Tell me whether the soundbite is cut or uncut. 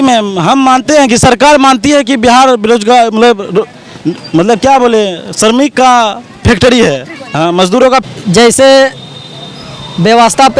cut